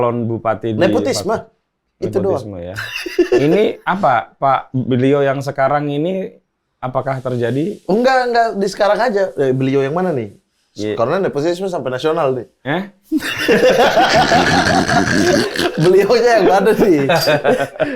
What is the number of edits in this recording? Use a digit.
0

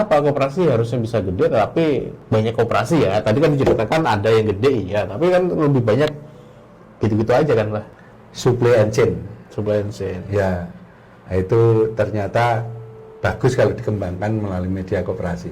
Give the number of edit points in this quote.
2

